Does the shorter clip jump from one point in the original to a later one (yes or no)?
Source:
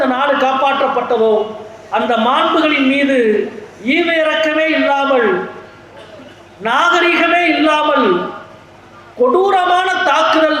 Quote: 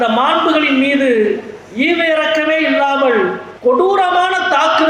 yes